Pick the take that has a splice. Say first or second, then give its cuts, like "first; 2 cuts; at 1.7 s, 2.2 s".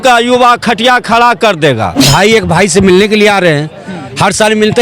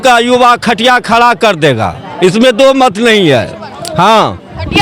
first; 1 cut; at 1.9 s